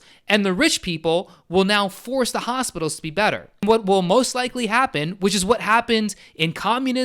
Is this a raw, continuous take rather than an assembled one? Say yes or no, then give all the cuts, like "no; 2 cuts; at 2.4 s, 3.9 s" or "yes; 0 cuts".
no; 1 cut; at 3.6 s